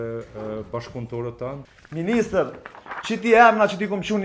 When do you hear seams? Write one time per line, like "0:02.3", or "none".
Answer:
0:01.6

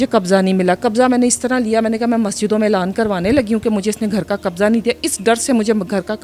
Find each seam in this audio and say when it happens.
none

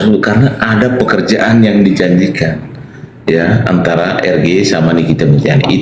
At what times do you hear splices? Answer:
none

